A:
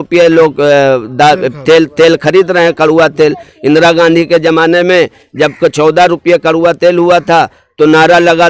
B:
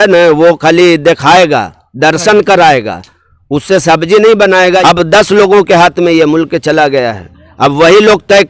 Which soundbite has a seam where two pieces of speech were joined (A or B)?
B